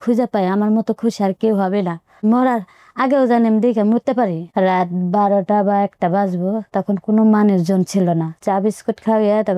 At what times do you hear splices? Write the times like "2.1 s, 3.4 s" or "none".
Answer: 2.2 s, 4.4 s, 8.4 s